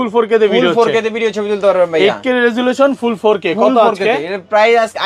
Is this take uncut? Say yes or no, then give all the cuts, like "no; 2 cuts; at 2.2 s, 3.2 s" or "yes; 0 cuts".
yes; 0 cuts